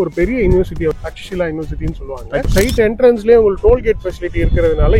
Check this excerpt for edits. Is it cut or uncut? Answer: cut